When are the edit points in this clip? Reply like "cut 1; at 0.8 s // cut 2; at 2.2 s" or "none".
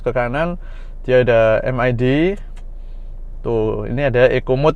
none